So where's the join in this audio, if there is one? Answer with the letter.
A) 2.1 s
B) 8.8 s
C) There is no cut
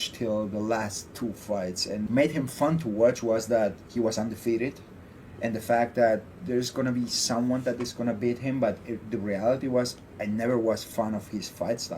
A